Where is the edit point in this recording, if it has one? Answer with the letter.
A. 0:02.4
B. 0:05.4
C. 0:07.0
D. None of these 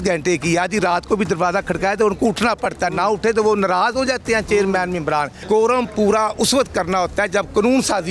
B